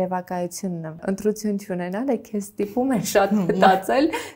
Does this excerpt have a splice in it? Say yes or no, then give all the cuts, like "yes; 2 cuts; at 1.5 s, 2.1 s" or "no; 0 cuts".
yes; 1 cut; at 1.0 s